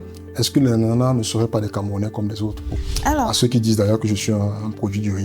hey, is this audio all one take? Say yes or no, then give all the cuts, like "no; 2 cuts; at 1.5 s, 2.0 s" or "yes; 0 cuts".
no; 1 cut; at 2.7 s